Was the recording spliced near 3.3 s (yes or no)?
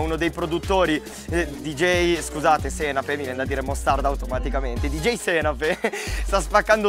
yes